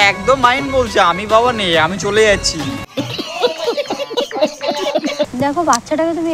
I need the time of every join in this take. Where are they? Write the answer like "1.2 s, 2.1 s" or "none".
5.3 s